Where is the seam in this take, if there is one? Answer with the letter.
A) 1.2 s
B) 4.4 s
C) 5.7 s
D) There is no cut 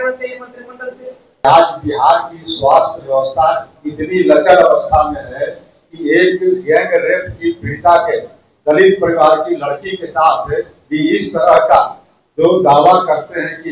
A